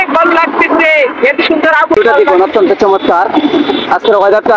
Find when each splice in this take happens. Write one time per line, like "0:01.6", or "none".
0:02.0